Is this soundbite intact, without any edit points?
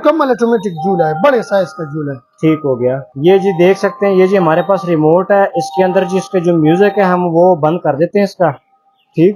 yes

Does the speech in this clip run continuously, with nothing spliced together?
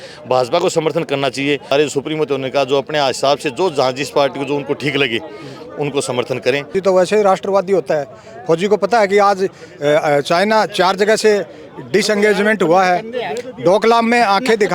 no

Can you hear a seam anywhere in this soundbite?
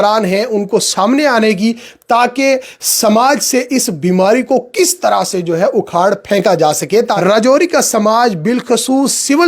yes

